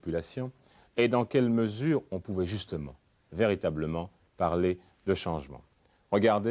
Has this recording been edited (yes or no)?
no